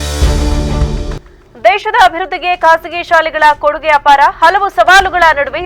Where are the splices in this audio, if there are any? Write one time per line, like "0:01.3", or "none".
0:01.2